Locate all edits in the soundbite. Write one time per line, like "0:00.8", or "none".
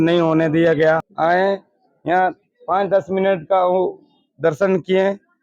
0:01.1